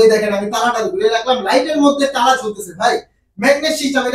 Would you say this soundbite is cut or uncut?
uncut